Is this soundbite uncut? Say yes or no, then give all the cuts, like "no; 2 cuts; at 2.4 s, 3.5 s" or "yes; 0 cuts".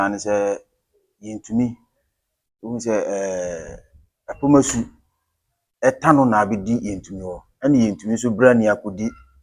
yes; 0 cuts